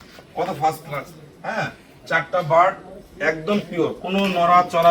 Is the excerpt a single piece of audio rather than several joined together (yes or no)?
yes